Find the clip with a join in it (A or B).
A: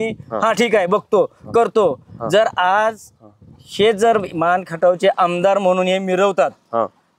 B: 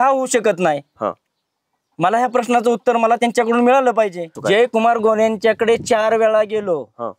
B